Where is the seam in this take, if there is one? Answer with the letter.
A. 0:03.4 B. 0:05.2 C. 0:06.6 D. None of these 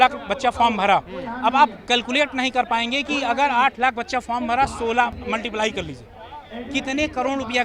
B